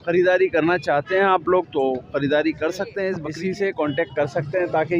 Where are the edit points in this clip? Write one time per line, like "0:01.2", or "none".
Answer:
0:03.2